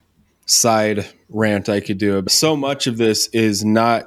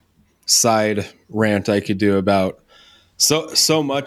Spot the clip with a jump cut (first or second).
first